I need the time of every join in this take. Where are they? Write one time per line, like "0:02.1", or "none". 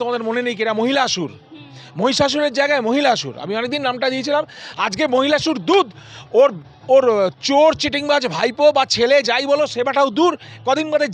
none